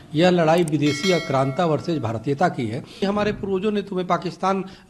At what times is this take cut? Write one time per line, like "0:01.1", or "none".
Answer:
0:03.0